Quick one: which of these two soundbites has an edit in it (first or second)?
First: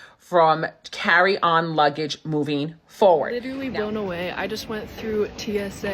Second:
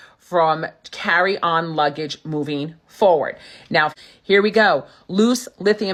first